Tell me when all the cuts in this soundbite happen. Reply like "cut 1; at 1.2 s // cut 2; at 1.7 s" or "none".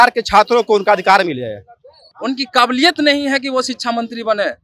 cut 1; at 2.1 s